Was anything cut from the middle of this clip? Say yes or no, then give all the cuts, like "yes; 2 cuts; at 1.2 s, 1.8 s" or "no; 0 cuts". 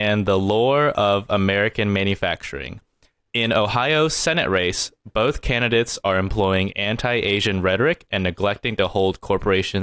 no; 0 cuts